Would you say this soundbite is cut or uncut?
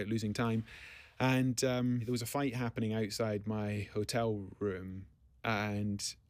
cut